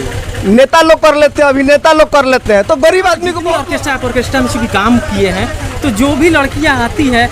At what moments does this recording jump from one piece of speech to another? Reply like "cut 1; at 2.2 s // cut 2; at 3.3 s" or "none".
cut 1; at 3.5 s